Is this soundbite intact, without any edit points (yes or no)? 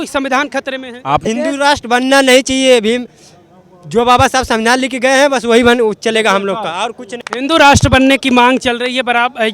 no